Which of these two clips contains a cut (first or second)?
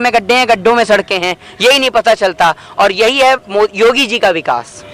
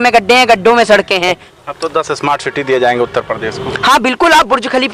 second